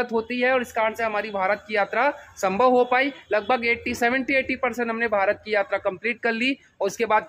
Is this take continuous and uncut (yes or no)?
yes